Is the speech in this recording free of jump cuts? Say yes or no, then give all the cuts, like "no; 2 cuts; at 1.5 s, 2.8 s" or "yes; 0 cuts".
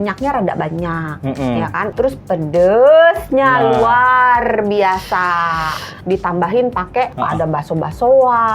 no; 3 cuts; at 1.9 s, 6.0 s, 7.1 s